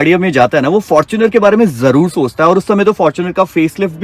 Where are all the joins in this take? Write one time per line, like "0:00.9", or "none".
none